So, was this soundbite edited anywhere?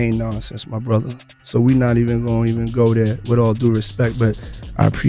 no; 0 cuts

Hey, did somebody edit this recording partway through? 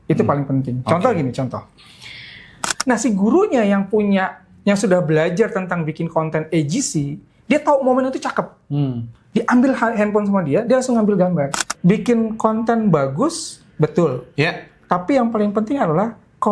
yes; 2 cuts; at 2.7 s, 11.7 s

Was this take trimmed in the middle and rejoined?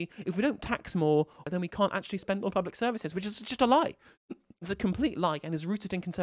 yes; 1 cut; at 1.4 s

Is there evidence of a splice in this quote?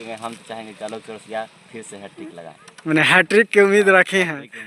no; 0 cuts

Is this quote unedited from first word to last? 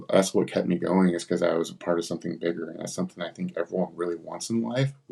yes; 0 cuts

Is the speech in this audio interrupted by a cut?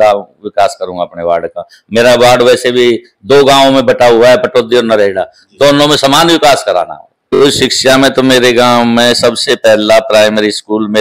yes; 1 cut; at 7.4 s

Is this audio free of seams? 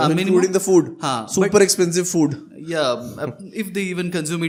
yes; 0 cuts

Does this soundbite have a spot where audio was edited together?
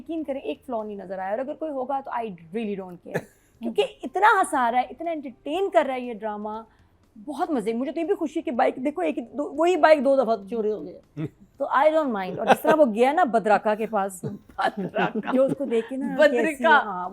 no; 0 cuts

